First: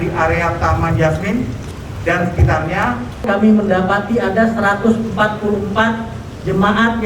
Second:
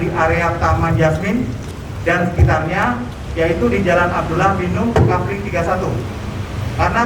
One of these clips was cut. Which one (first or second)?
first